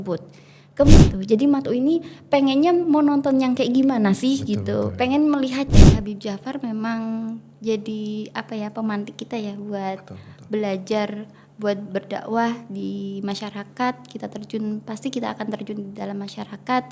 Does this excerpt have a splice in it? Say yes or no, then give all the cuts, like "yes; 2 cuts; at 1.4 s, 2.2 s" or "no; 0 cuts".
yes; 2 cuts; at 1.0 s, 5.7 s